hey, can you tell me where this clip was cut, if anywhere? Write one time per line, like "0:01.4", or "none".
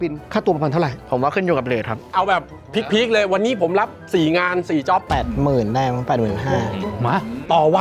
0:02.1
0:05.1
0:06.8